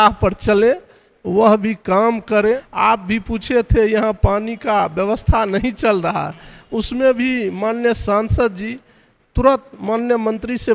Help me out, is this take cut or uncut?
cut